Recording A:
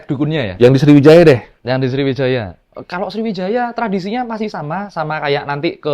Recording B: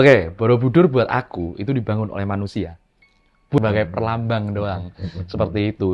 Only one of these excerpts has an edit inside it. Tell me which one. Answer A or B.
B